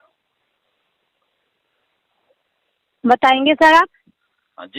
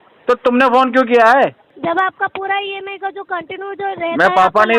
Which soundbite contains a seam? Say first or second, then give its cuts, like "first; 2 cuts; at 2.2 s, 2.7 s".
second; 1 cut; at 1.7 s